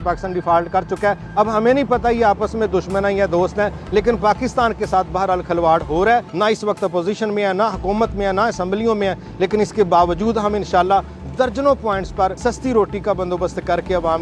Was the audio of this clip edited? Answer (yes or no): yes